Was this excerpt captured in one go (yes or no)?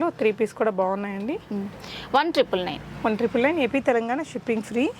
yes